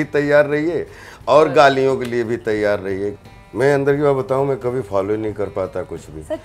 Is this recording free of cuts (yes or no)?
no